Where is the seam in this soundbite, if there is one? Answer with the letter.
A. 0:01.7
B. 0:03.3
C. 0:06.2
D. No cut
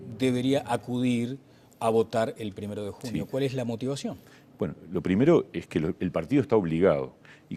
B